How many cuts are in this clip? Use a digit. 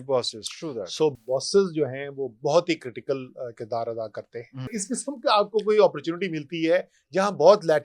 1